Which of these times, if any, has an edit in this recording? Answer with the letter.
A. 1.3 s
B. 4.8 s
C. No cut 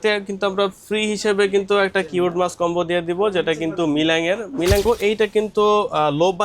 B